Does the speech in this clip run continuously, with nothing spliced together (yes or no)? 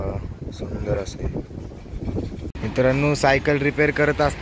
no